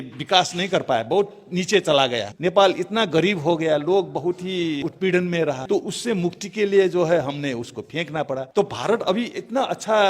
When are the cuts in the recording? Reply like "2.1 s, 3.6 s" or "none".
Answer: 2.3 s, 4.8 s, 5.6 s, 8.5 s

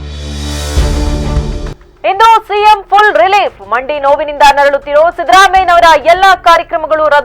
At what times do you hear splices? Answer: 1.8 s

